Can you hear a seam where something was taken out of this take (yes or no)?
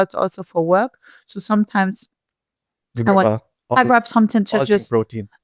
no